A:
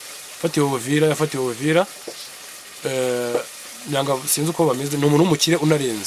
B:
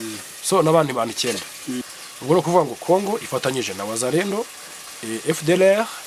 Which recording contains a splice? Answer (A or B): B